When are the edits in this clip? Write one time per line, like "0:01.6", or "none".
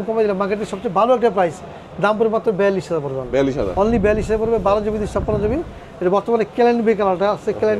none